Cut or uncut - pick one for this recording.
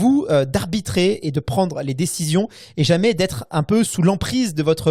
uncut